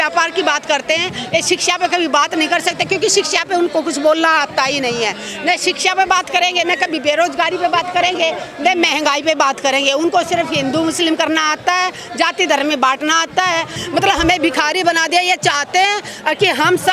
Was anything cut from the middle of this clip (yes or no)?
yes